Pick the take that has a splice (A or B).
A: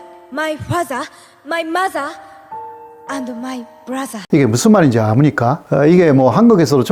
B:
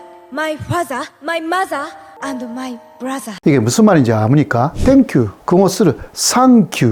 B